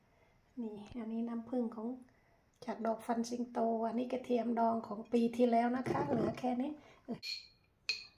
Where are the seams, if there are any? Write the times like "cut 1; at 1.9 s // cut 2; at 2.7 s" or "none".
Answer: cut 1; at 7.2 s